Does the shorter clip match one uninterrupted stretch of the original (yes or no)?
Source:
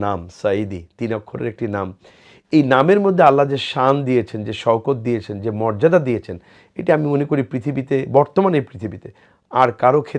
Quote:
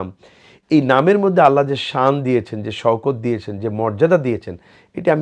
yes